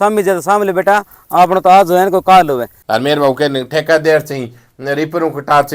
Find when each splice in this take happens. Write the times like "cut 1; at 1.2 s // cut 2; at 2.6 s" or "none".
cut 1; at 2.7 s